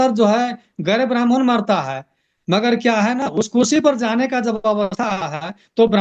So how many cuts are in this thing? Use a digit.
0